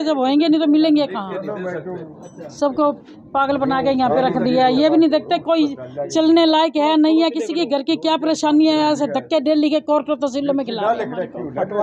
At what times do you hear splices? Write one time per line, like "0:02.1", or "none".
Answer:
none